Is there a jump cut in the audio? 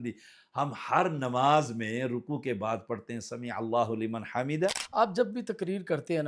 yes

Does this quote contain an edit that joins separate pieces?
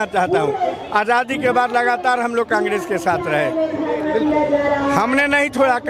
no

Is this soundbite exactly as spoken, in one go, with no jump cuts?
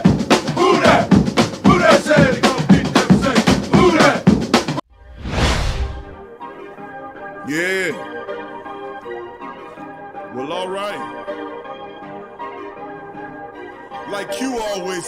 no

